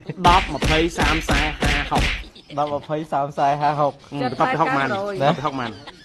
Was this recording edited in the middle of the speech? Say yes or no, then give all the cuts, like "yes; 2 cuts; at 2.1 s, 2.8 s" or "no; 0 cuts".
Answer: no; 0 cuts